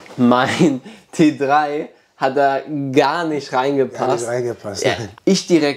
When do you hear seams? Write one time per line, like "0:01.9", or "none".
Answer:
0:04.6